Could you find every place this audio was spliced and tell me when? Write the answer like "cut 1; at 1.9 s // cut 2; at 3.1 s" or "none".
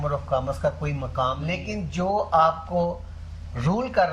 cut 1; at 1.5 s